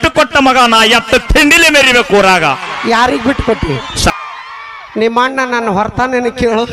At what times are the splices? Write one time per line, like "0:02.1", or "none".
0:04.1